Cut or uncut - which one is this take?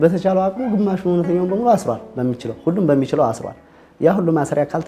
uncut